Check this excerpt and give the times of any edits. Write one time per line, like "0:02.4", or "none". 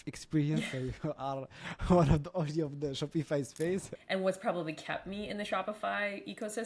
0:03.9